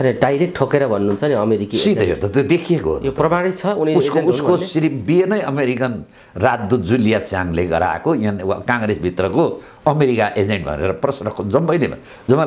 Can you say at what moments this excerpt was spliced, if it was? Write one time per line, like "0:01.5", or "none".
none

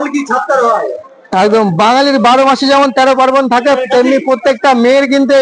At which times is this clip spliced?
none

